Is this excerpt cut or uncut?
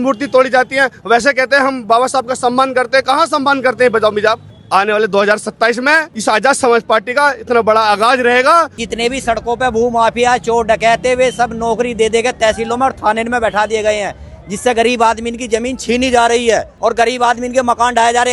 cut